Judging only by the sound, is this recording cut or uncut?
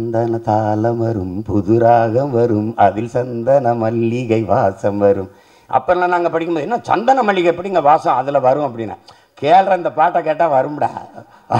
uncut